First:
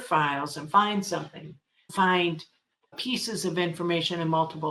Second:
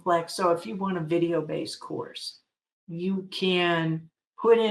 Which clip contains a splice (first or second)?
first